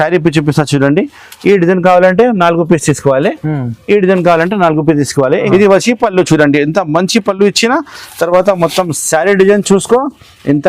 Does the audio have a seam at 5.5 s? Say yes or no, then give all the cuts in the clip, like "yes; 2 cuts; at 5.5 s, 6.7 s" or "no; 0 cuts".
yes; 1 cut; at 5.5 s